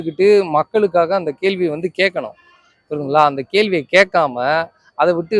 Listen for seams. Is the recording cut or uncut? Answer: uncut